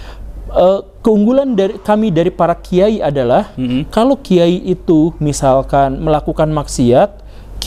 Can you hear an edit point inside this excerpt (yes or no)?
no